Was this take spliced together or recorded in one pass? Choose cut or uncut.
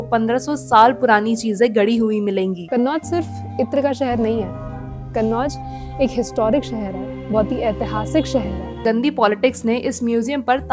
cut